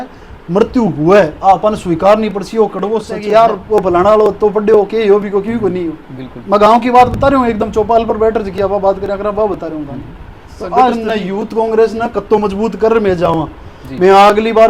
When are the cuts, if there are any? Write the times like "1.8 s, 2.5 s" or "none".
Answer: 3.2 s, 11.1 s